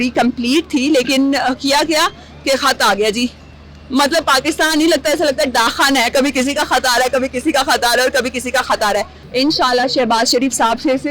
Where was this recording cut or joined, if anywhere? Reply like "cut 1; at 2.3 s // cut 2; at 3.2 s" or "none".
cut 1; at 9.2 s